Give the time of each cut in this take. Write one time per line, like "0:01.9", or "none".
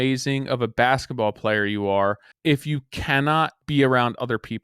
0:02.3
0:03.6